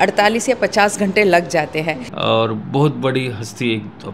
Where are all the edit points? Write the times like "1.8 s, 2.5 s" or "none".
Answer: 2.1 s